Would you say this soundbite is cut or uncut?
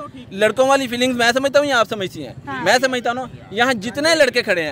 uncut